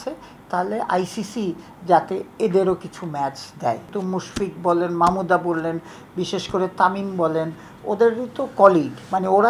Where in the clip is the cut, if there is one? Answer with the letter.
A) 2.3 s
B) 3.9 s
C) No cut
B